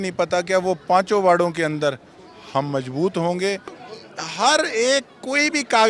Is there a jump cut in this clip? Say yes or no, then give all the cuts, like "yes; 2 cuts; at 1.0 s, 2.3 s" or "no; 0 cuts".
yes; 1 cut; at 3.8 s